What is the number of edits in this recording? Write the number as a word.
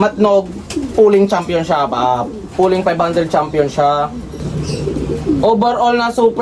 zero